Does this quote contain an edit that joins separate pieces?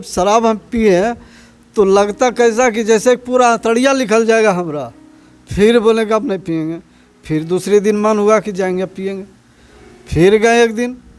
no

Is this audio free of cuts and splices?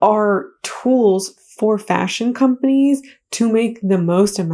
yes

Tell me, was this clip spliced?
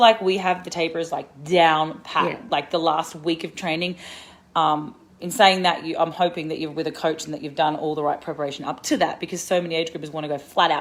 no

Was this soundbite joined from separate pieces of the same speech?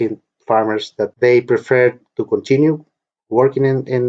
yes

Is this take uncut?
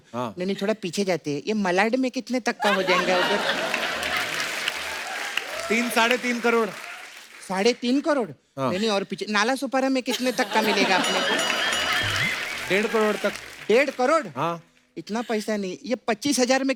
yes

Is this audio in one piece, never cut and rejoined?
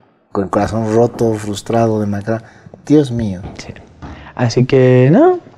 yes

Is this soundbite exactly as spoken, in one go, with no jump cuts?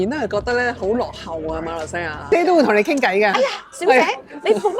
no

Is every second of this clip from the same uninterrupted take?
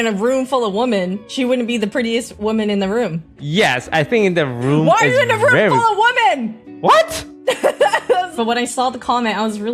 no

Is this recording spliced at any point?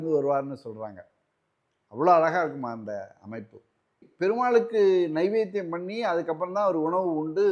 yes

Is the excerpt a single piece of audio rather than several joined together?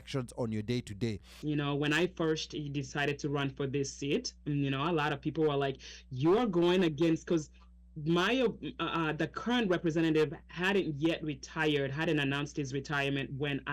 no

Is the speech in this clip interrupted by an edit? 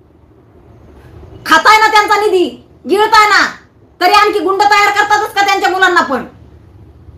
no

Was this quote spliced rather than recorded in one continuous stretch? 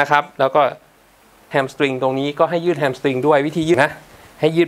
yes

